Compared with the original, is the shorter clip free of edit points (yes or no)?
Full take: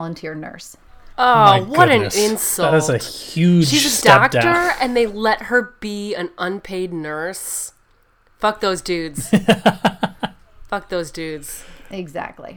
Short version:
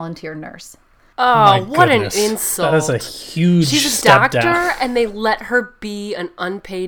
yes